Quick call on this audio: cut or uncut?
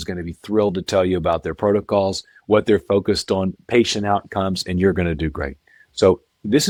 uncut